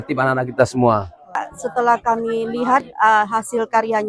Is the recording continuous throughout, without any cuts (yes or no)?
no